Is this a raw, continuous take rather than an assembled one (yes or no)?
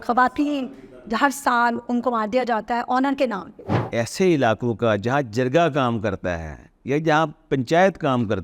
no